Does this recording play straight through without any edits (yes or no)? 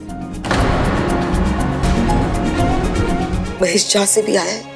no